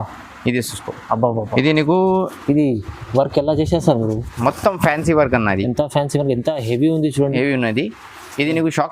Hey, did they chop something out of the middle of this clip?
no; 0 cuts

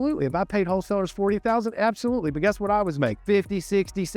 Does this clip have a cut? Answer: yes; 1 cut; at 3.2 s

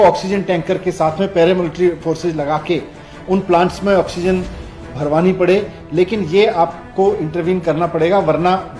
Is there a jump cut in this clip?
no; 0 cuts

